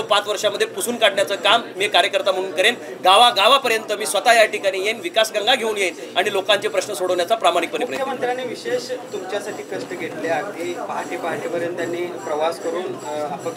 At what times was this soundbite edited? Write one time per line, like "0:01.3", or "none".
none